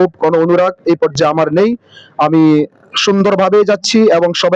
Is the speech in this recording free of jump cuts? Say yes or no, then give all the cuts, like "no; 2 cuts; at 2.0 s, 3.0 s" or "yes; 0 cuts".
yes; 0 cuts